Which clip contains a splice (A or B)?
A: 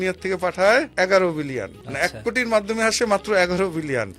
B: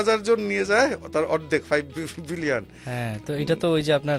A